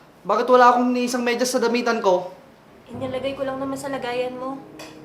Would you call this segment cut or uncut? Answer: uncut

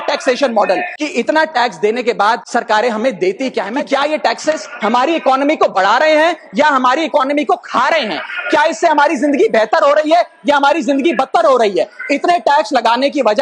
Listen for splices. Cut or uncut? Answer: cut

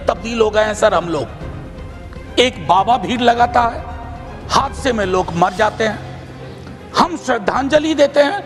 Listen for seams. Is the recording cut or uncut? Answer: uncut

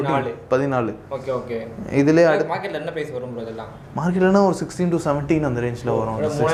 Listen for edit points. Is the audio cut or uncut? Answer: uncut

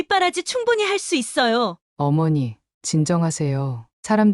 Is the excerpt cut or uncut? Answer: cut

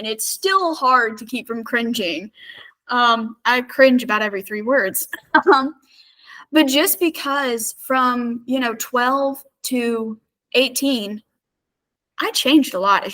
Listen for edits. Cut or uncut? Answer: uncut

